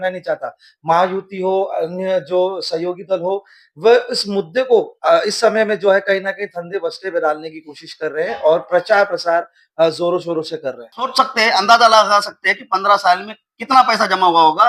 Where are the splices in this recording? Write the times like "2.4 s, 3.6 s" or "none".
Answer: 11.1 s